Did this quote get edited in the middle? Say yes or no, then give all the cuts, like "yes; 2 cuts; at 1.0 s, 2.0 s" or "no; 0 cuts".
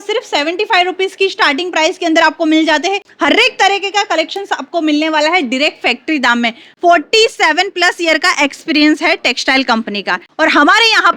yes; 3 cuts; at 3.1 s, 6.6 s, 10.3 s